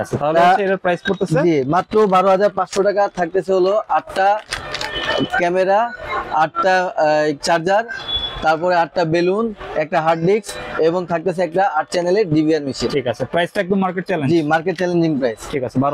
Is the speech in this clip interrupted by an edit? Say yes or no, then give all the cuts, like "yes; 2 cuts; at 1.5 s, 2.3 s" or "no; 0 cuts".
no; 0 cuts